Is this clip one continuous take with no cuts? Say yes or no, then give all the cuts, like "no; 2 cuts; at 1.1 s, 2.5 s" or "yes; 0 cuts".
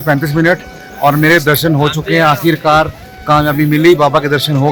yes; 0 cuts